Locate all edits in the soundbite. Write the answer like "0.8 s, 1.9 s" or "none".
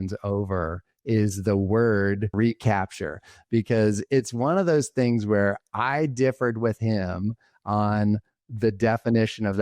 2.3 s

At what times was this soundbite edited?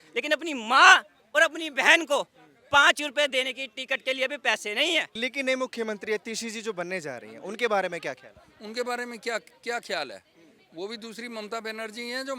5.1 s

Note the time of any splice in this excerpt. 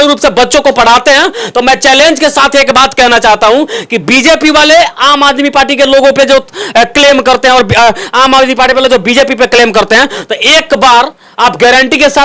none

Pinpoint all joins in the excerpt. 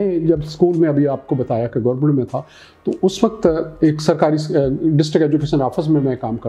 none

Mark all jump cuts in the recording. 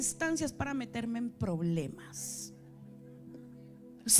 none

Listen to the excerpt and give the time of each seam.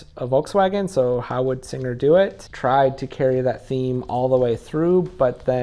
2.5 s

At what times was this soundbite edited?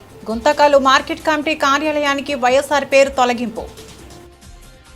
3.8 s

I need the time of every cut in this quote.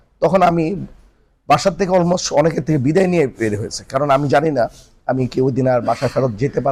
none

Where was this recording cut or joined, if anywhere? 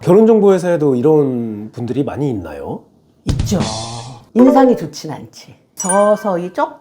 4.3 s

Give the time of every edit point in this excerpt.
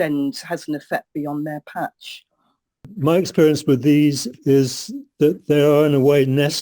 2.9 s

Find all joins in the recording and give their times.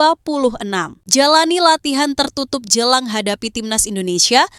1.0 s

